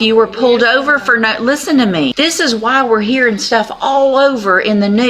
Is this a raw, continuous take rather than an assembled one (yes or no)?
no